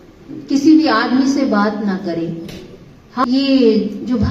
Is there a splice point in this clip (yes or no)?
yes